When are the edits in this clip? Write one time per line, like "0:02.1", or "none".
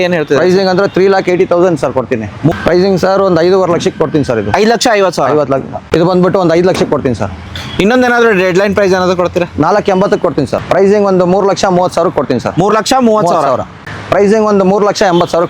0:02.5
0:05.8
0:10.6
0:13.8